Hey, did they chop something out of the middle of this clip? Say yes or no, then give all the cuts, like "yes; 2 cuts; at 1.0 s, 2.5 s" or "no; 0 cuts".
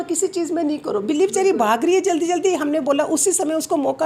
no; 0 cuts